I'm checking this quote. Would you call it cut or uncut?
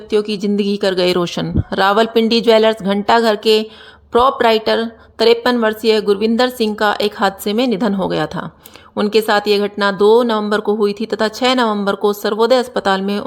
uncut